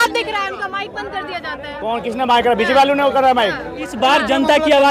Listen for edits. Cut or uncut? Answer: cut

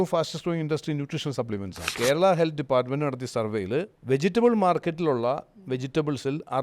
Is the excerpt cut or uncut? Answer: cut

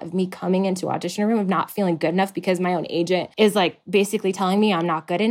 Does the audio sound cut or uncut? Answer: cut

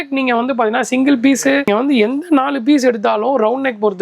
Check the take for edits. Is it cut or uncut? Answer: cut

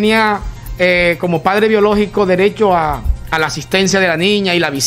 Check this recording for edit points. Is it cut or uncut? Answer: uncut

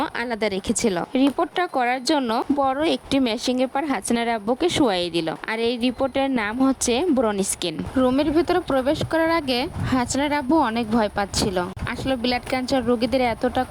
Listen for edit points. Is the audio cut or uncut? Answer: cut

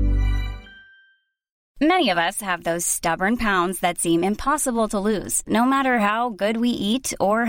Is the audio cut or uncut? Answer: cut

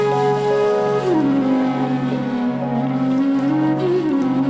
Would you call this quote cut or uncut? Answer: uncut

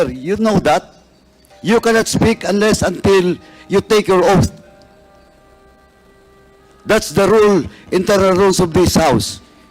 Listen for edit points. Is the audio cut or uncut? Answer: uncut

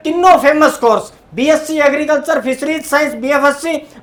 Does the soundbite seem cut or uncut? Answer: uncut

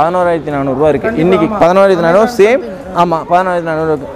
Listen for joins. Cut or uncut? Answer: uncut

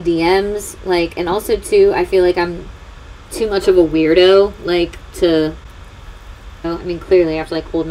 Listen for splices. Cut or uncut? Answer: cut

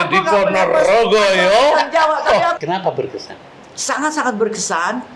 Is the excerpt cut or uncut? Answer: cut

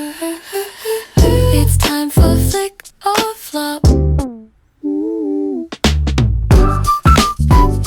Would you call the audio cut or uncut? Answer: uncut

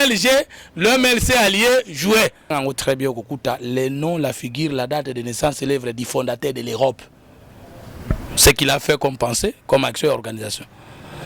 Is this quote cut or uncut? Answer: cut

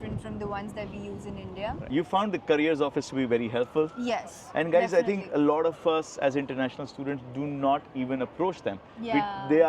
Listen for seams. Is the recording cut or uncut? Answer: cut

